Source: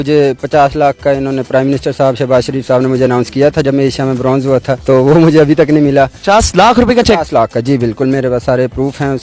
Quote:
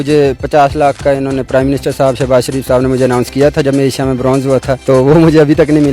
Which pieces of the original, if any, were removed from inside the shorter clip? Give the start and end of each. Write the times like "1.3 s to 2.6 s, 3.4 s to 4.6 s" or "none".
none